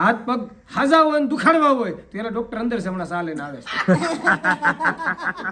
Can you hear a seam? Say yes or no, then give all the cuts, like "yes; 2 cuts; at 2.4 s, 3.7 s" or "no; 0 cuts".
no; 0 cuts